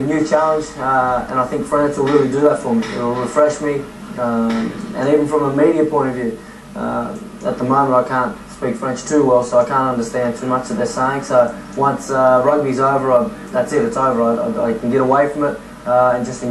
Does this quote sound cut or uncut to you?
uncut